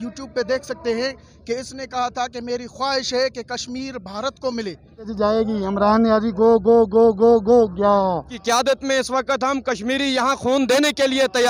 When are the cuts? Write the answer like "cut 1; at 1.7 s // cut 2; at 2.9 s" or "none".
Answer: cut 1; at 5.1 s // cut 2; at 8.3 s